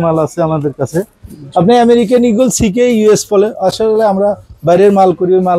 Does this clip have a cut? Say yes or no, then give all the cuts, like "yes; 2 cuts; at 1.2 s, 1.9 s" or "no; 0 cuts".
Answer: no; 0 cuts